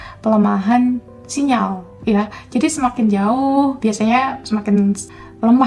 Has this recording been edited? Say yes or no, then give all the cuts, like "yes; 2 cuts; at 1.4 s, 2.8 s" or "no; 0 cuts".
no; 0 cuts